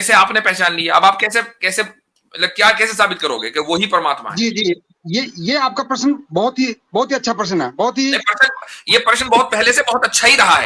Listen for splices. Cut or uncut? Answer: uncut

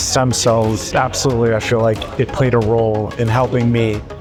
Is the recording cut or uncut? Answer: uncut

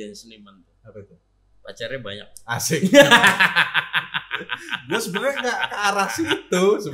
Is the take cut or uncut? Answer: uncut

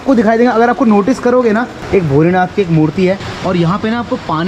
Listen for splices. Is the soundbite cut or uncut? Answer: cut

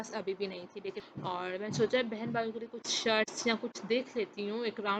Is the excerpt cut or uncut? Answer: cut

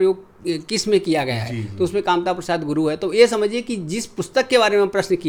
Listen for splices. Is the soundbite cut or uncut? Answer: uncut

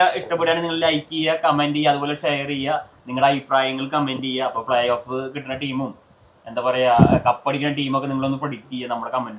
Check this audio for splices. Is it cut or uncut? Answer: uncut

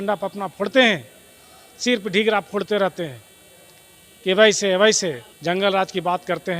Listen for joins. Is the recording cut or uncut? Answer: cut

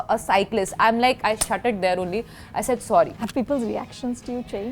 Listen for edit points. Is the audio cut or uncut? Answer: cut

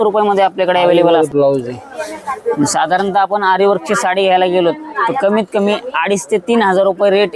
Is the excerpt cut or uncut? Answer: cut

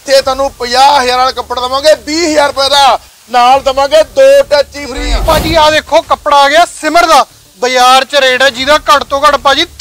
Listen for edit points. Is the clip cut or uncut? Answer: cut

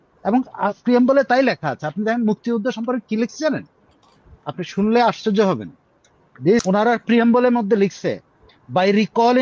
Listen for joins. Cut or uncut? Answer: cut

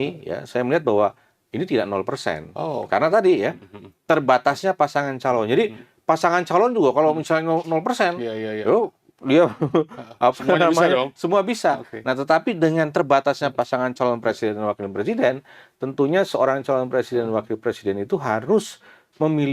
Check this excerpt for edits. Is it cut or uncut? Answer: uncut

